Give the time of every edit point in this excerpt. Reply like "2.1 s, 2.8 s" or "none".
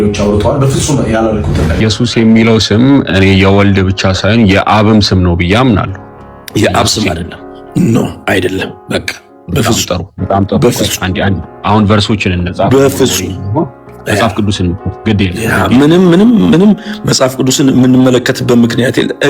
1.8 s